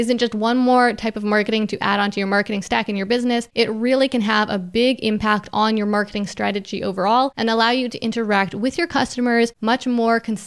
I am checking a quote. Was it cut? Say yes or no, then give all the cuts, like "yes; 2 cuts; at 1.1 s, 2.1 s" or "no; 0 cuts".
yes; 3 cuts; at 3.5 s, 7.3 s, 9.6 s